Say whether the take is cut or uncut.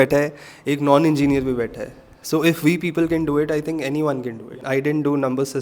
cut